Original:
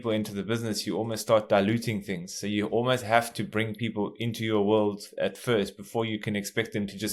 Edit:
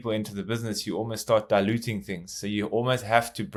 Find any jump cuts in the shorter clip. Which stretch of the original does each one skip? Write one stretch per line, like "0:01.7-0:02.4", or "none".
none